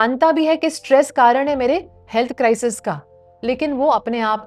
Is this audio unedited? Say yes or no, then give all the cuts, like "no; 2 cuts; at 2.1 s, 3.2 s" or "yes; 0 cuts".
yes; 0 cuts